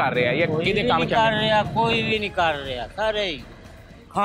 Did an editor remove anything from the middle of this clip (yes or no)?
no